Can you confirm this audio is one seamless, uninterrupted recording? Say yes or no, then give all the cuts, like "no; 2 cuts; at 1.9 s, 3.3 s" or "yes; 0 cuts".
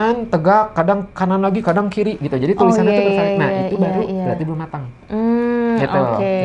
yes; 0 cuts